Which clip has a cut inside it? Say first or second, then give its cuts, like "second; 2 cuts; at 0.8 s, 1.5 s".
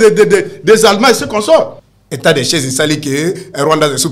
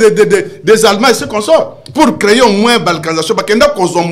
first; 1 cut; at 1.8 s